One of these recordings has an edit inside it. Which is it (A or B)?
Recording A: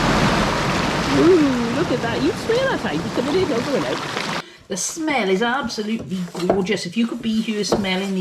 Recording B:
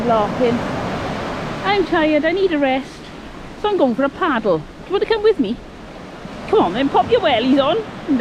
A